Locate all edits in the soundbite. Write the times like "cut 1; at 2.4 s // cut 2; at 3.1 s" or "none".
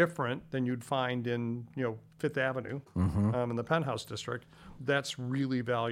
none

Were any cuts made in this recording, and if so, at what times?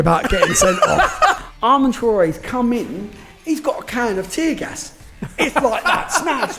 cut 1; at 1.4 s // cut 2; at 5.2 s

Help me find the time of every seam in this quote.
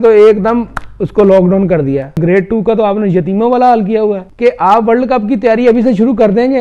cut 1; at 2.2 s // cut 2; at 4.3 s

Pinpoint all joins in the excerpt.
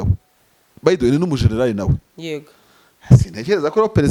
none

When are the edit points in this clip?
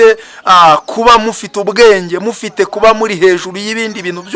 none

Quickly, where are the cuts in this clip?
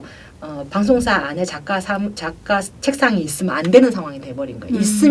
none

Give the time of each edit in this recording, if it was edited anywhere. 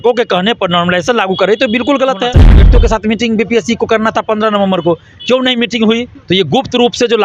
cut 1; at 2.7 s // cut 2; at 6.1 s

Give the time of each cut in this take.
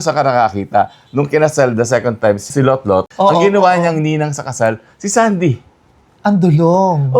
cut 1; at 3.1 s

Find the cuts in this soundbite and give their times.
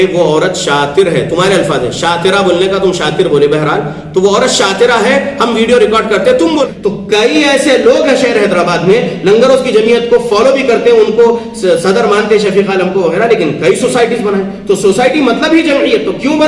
cut 1; at 6.6 s

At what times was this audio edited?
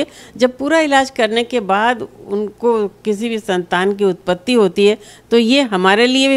none

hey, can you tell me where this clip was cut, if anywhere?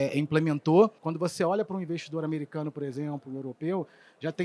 cut 1; at 1.0 s

